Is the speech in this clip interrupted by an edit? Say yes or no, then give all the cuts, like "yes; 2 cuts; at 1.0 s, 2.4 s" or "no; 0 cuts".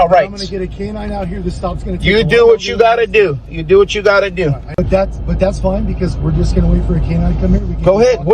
yes; 1 cut; at 4.8 s